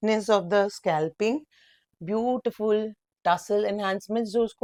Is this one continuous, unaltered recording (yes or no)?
yes